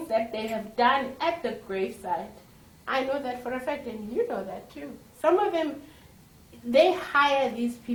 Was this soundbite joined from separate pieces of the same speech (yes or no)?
no